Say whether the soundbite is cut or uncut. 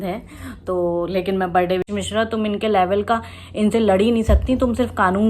cut